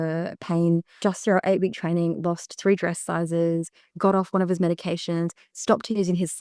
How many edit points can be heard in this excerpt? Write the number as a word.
one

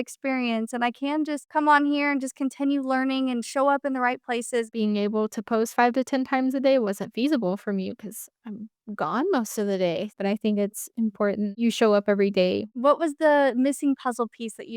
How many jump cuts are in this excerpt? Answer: three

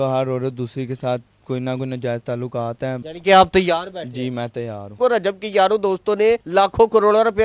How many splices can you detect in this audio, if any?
three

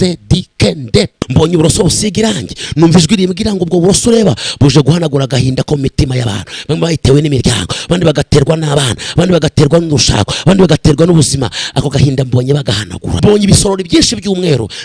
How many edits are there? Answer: two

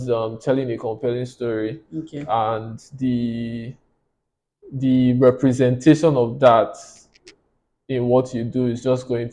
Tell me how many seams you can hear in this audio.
zero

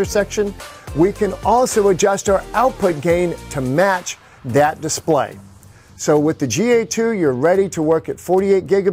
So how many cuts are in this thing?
zero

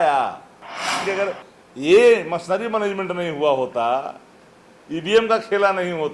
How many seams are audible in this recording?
one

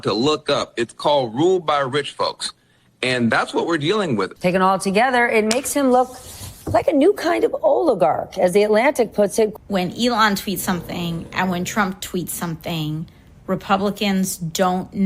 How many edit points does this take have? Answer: two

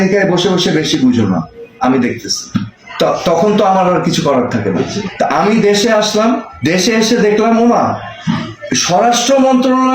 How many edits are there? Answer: one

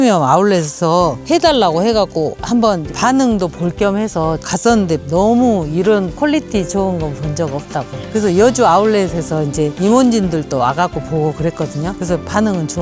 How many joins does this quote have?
zero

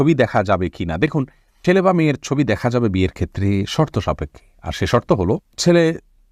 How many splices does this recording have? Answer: zero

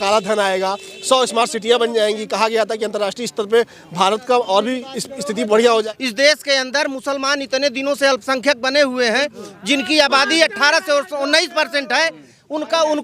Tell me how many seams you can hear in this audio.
one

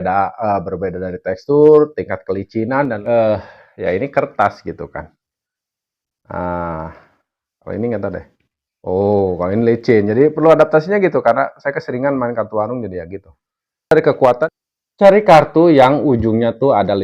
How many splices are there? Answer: two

